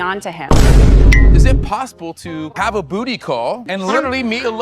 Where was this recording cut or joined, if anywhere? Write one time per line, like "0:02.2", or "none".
0:01.6